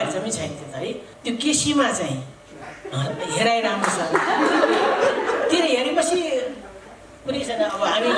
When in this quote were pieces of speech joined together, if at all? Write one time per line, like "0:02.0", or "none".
0:01.1

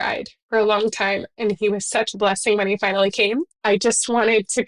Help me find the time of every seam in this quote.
0:03.6

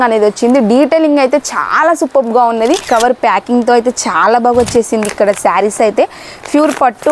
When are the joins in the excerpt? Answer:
0:02.8

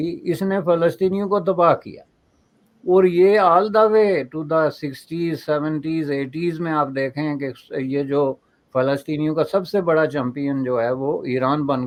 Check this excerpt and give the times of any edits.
none

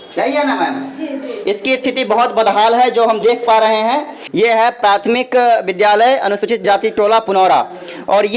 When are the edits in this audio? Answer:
0:04.2

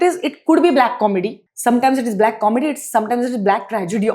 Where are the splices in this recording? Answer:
0:01.4

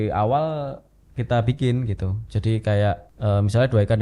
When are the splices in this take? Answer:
0:03.1

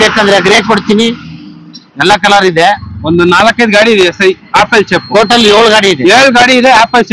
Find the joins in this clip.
0:02.9

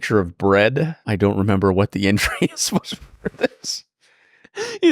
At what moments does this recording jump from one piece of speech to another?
0:01.0

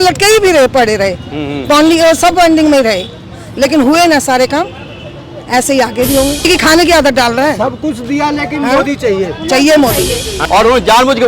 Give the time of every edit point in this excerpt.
0:06.5
0:10.4

